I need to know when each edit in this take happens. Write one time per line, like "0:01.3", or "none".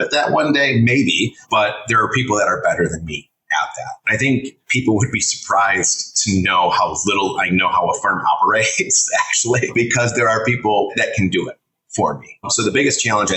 0:01.4
0:04.0
0:09.7
0:10.9
0:12.4